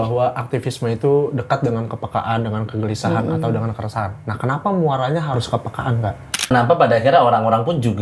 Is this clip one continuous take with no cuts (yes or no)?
no